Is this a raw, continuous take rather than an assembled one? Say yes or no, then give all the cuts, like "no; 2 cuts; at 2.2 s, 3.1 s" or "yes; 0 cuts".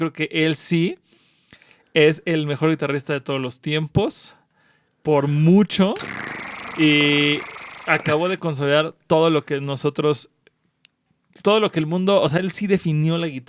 yes; 0 cuts